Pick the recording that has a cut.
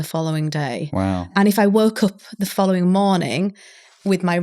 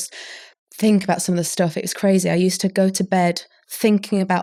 first; 1 cut; at 1.3 s

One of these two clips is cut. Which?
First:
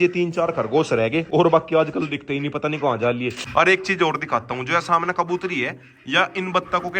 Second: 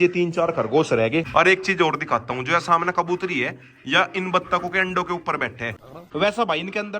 second; 2 cuts; at 1.3 s, 5.8 s

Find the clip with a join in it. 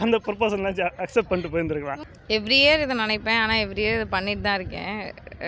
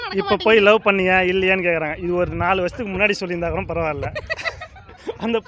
first; 1 cut; at 1.9 s

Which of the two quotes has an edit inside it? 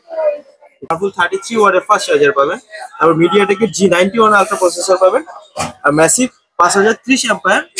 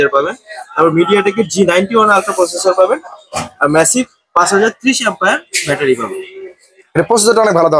first; 1 cut; at 0.9 s

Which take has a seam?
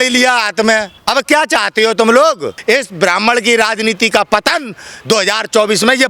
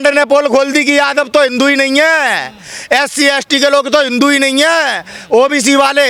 first; 2 cuts; at 0.9 s, 2.6 s

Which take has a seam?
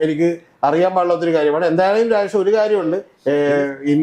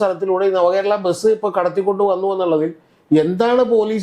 first; 1 cut; at 3.1 s

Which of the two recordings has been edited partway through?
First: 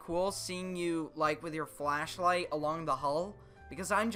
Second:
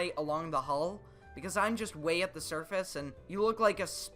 second; 1 cut; at 3.2 s

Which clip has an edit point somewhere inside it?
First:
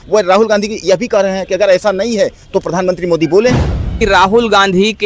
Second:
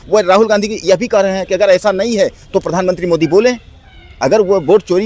first; 1 cut; at 3.9 s

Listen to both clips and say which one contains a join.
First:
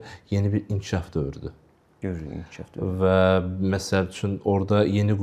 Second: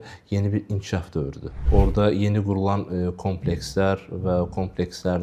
second; 1 cut; at 1.6 s

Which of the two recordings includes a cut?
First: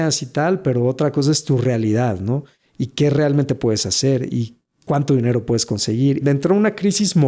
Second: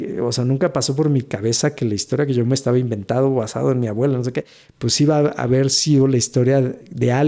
first; 1 cut; at 6.2 s

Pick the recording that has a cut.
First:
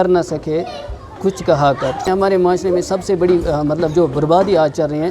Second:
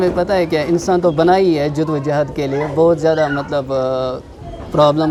first; 1 cut; at 2.1 s

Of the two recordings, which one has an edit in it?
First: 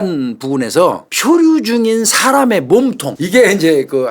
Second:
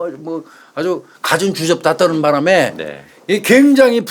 first; 2 cuts; at 1.1 s, 3.1 s

